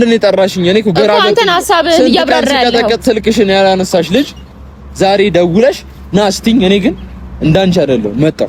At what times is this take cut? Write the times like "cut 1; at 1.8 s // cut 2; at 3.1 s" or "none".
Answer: none